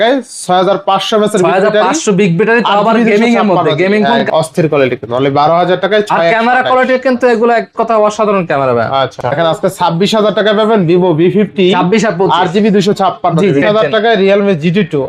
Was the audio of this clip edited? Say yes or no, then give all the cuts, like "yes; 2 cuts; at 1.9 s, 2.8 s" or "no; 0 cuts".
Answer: yes; 3 cuts; at 4.2 s, 9.3 s, 13.6 s